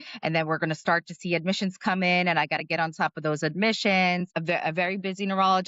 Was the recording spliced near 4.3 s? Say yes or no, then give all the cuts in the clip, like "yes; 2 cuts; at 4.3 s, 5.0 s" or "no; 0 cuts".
yes; 1 cut; at 4.3 s